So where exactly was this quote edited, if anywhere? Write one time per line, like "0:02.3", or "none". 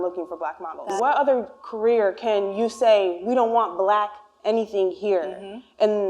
0:00.9